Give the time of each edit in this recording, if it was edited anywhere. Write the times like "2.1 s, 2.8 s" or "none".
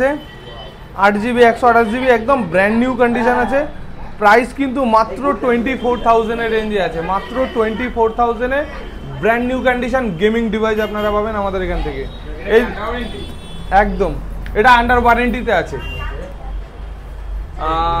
none